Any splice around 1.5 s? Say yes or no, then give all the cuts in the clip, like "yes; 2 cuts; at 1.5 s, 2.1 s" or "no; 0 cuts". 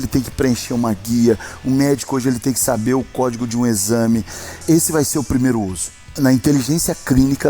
no; 2 cuts; at 4.6 s, 6.1 s